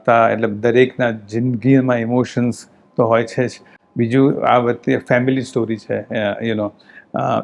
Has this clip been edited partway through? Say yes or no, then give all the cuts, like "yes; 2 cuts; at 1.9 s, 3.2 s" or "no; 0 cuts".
no; 0 cuts